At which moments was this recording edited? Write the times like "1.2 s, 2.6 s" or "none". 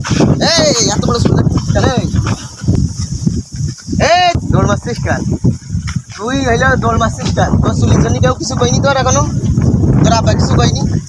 2.8 s, 4.4 s